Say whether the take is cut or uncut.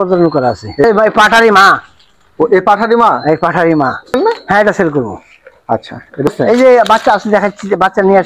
cut